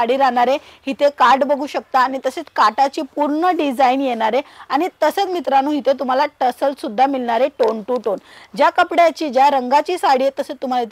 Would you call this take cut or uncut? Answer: uncut